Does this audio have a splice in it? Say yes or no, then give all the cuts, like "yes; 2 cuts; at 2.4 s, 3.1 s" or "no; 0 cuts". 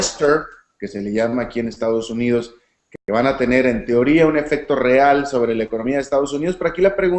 no; 0 cuts